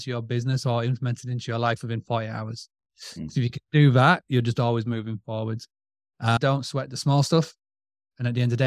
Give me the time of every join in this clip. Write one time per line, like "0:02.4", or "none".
0:06.4